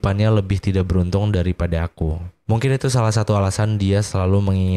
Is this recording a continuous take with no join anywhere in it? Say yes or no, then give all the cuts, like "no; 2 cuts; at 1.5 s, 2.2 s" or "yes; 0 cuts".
no; 1 cut; at 2.3 s